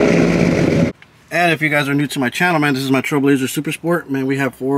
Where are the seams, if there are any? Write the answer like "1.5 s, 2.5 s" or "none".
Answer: 0.9 s